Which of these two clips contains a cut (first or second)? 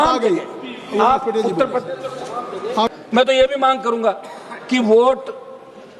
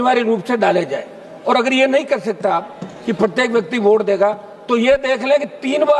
first